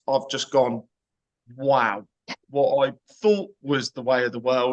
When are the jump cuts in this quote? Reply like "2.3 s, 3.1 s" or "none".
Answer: none